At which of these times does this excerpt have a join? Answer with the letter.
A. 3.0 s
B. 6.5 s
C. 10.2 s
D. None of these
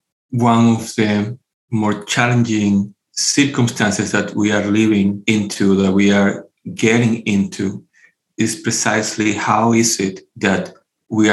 C